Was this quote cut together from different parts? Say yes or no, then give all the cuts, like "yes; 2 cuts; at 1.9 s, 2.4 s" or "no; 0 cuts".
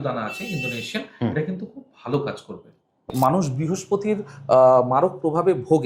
yes; 1 cut; at 3.1 s